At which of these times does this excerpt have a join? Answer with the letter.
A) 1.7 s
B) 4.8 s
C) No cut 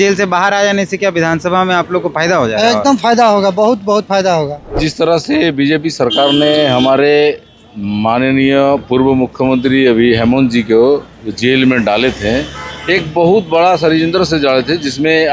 B